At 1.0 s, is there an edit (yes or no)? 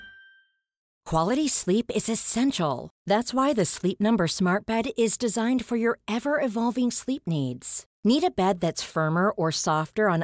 yes